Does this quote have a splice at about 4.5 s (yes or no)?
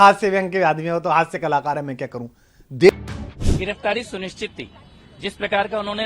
no